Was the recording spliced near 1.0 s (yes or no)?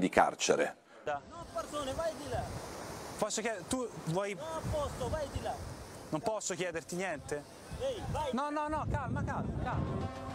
yes